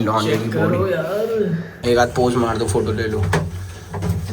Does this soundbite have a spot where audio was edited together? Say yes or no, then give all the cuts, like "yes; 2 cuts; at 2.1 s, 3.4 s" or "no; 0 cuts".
yes; 1 cut; at 1.7 s